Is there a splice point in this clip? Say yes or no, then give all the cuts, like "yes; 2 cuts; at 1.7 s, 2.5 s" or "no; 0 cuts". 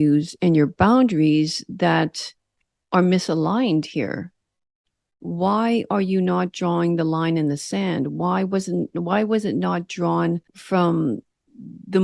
yes; 1 cut; at 10.5 s